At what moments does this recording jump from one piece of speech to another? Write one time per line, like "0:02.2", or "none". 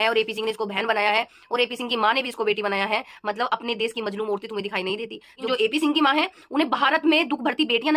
0:05.4